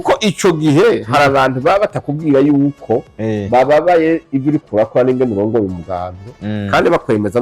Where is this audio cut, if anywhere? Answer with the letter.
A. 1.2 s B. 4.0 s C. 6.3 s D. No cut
D